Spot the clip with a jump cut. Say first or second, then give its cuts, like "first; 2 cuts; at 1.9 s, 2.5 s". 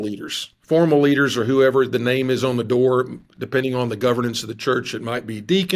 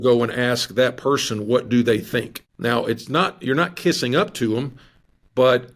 second; 1 cut; at 2.4 s